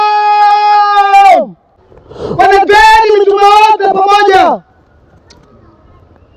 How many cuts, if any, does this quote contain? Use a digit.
1